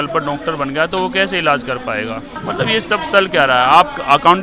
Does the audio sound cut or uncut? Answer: cut